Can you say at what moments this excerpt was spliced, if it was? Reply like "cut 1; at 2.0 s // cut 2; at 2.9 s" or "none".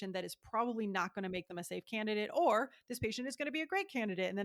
none